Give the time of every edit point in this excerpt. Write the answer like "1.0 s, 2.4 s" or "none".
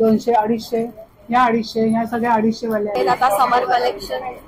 2.9 s